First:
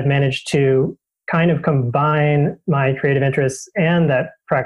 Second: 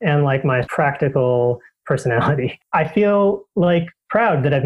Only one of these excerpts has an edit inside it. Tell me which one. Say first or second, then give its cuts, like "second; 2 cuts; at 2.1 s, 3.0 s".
second; 1 cut; at 2.6 s